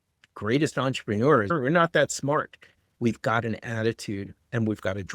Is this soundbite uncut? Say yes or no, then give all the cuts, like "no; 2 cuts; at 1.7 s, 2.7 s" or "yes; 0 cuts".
no; 2 cuts; at 1.5 s, 2.9 s